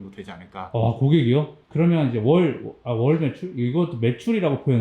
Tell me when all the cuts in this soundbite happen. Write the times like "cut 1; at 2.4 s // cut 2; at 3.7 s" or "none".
cut 1; at 1.6 s